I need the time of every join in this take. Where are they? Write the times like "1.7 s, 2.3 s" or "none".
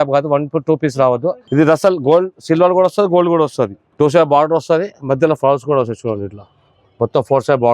1.4 s, 3.8 s